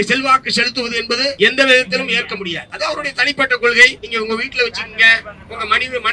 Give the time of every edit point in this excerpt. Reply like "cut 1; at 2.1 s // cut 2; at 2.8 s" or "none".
cut 1; at 1.4 s // cut 2; at 2.6 s // cut 3; at 4.0 s